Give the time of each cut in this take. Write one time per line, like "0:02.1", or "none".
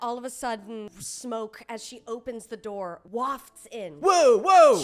0:00.9
0:03.0

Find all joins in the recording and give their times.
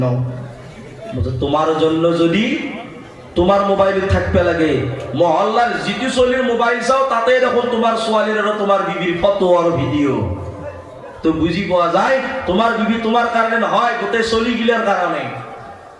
none

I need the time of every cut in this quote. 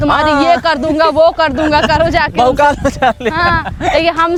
none

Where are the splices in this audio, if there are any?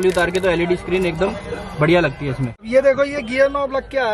0:02.5

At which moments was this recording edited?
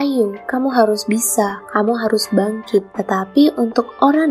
0:01.6

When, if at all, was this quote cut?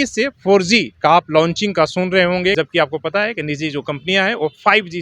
0:00.9
0:02.5

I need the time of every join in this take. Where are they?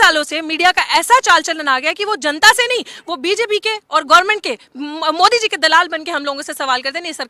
none

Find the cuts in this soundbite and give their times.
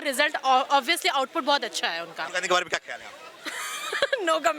0:02.3

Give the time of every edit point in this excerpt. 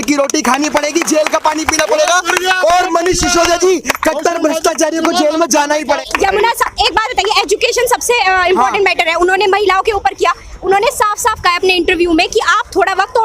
0:06.0

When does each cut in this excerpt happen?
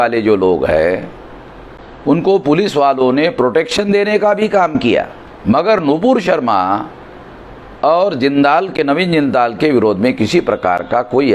none

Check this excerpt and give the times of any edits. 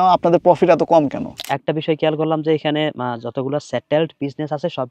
0:01.5

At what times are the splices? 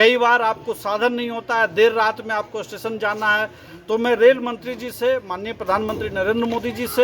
0:03.7

